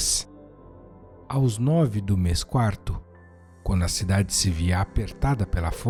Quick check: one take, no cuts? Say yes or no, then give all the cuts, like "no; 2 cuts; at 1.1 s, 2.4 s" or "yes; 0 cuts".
yes; 0 cuts